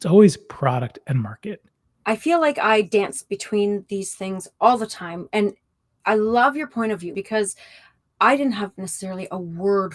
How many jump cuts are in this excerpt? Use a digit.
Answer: 2